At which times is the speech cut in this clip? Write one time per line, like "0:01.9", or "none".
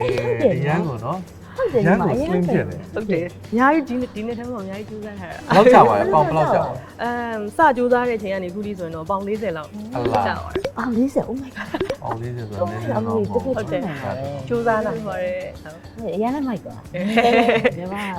none